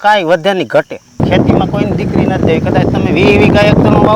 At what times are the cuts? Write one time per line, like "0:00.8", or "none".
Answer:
0:01.2